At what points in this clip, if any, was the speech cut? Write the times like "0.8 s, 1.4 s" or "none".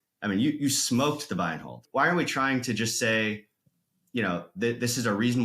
1.8 s